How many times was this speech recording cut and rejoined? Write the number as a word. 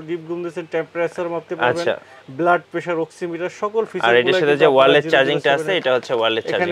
zero